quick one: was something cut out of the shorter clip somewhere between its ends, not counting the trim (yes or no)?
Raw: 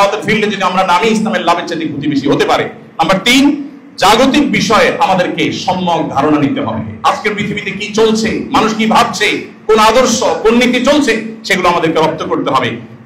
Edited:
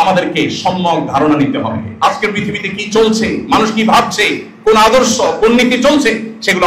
no